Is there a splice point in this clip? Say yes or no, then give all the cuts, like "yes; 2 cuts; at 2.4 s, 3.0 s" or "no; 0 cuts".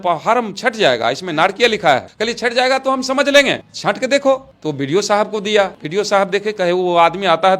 yes; 1 cut; at 5.8 s